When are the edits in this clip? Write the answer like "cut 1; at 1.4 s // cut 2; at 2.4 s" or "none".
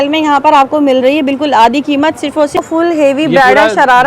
cut 1; at 2.6 s